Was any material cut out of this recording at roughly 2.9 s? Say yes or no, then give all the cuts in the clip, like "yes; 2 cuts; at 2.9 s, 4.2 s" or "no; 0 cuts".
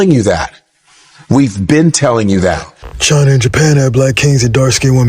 yes; 1 cut; at 2.9 s